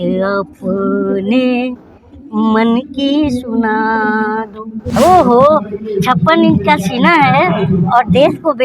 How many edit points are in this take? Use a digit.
1